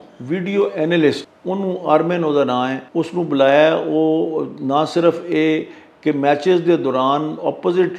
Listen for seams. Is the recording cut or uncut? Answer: cut